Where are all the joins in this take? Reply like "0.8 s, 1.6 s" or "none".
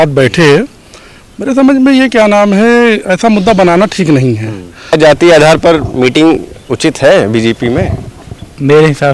4.9 s

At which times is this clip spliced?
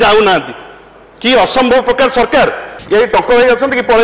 2.7 s

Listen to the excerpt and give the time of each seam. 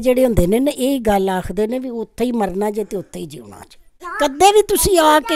4.0 s

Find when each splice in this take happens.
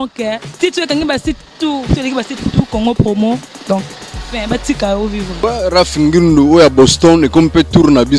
none

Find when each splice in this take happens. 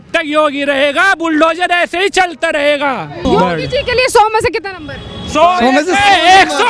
3.2 s

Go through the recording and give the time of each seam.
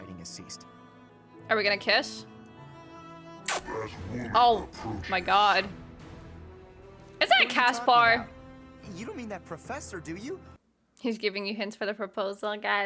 1.1 s, 10.5 s

